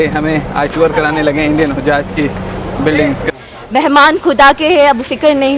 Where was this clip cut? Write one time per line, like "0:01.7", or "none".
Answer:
0:03.3